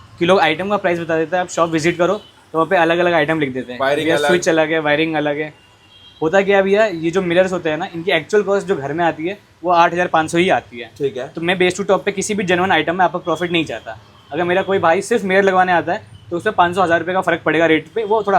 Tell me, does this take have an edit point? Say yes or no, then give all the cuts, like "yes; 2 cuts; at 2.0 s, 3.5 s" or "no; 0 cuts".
no; 0 cuts